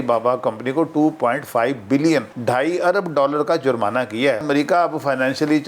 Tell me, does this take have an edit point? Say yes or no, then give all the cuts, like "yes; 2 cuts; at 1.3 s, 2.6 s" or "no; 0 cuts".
yes; 2 cuts; at 2.3 s, 4.4 s